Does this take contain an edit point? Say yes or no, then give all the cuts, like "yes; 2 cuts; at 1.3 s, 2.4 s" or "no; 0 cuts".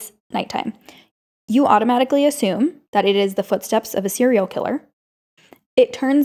no; 0 cuts